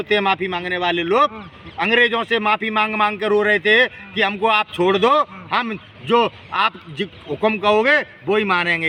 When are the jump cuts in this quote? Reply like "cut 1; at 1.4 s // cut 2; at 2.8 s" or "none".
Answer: none